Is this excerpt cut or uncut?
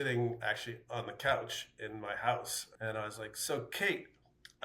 cut